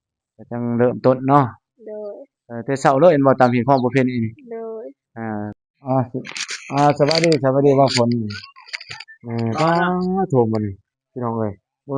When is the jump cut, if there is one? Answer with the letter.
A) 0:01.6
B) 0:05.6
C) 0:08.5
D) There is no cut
B